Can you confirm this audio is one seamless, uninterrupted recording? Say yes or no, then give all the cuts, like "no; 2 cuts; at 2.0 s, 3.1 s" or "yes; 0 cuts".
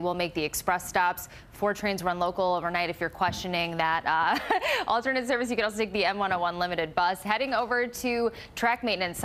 no; 1 cut; at 6.6 s